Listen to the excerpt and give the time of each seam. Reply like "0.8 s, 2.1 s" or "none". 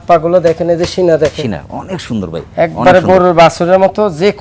none